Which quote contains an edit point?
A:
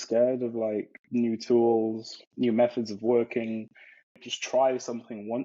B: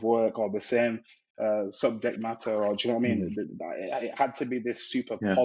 A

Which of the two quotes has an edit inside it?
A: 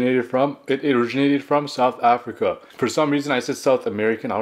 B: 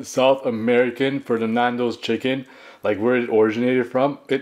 A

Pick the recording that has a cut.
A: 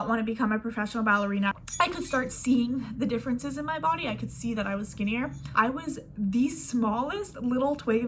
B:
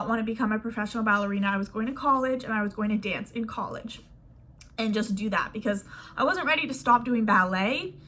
A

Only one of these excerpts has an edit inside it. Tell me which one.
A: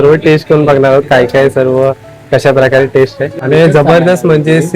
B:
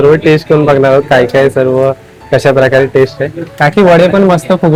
A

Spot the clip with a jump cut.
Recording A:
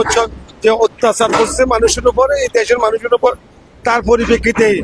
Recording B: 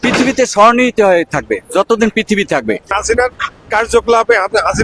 B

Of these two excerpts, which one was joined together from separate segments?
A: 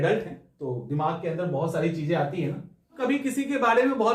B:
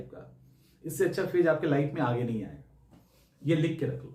A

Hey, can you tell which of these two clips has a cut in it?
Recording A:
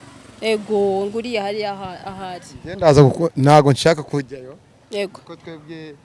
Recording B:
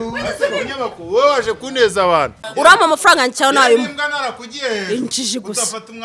B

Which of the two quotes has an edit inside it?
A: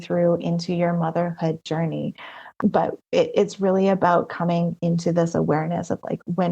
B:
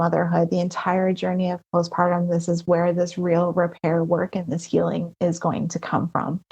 A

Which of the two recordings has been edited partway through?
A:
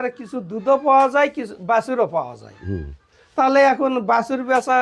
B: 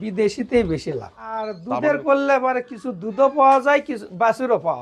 B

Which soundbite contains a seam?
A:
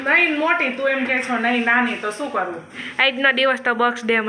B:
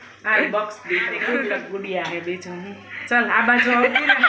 B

